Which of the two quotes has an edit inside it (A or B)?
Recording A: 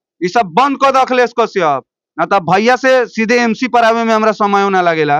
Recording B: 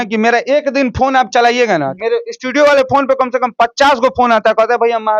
B